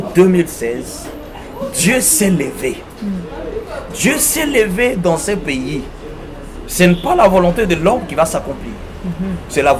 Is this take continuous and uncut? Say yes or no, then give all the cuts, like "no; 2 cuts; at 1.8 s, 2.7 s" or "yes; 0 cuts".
yes; 0 cuts